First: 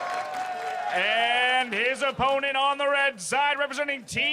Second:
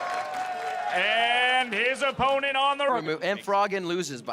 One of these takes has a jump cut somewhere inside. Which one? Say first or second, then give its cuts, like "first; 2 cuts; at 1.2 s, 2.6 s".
first; 1 cut; at 2.9 s